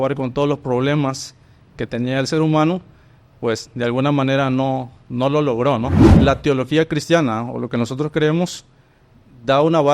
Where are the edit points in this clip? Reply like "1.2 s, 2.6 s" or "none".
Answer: 6.0 s